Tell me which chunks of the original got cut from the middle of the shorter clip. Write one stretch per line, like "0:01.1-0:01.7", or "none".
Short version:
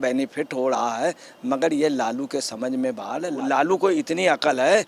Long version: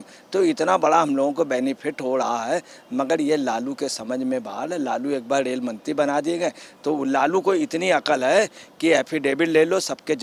0:04.9-0:07.0